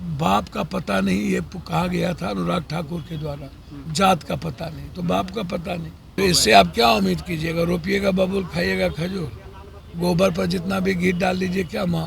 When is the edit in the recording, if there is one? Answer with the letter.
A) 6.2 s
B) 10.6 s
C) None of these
A